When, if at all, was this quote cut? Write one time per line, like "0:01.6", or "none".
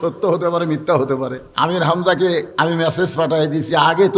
0:01.4
0:02.5